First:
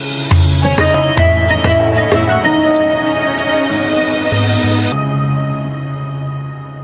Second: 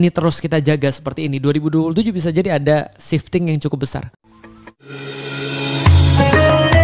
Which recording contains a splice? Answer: second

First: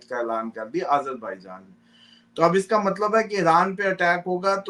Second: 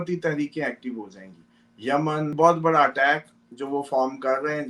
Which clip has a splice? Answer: second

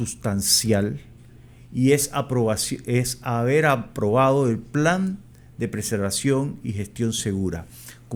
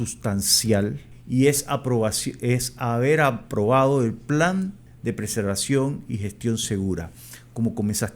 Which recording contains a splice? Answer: second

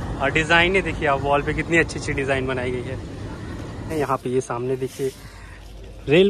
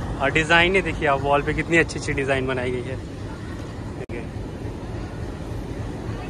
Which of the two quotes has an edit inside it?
first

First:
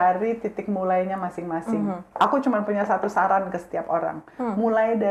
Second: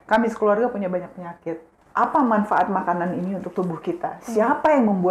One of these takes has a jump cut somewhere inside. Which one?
second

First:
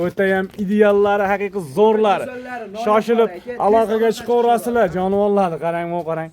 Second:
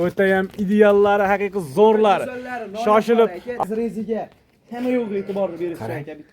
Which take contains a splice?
second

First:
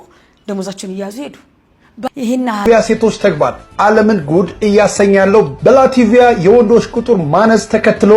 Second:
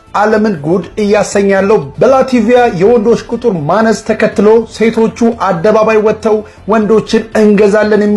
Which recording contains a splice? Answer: first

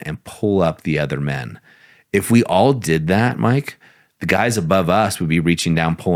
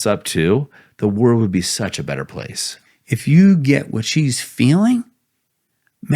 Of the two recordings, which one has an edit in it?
second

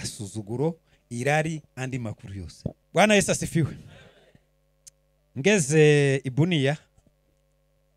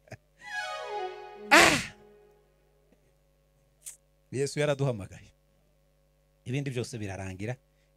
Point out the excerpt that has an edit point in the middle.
first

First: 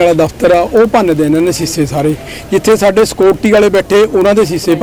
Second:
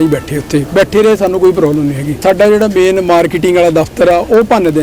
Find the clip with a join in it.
second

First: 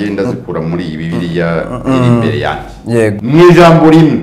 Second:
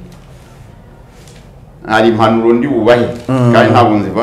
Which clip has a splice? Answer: first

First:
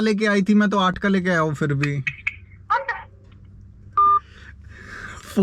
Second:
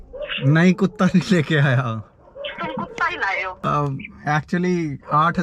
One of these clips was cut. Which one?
second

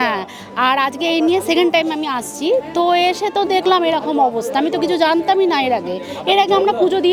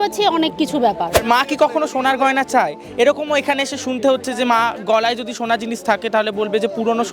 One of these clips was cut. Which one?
second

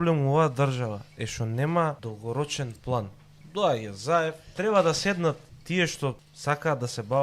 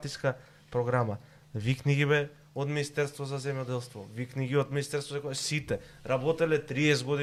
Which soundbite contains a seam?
first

